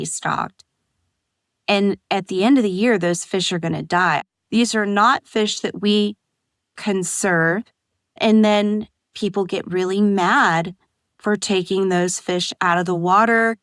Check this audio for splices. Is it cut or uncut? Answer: cut